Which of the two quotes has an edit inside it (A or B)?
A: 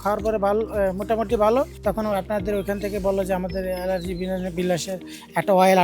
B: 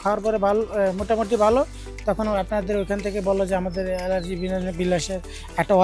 A